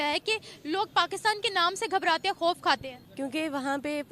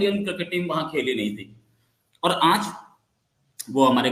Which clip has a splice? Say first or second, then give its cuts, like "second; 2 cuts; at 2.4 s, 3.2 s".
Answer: first; 1 cut; at 3.0 s